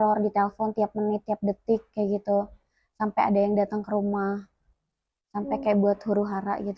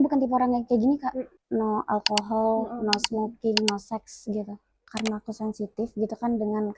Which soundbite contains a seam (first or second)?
second